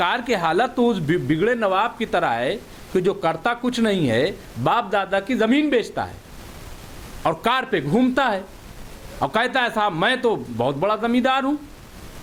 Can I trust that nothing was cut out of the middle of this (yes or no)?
yes